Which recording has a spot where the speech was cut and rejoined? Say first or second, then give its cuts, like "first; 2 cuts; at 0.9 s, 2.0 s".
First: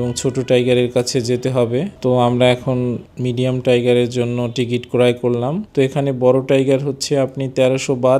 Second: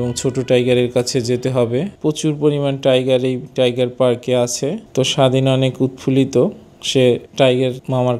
second; 2 cuts; at 1.9 s, 4.8 s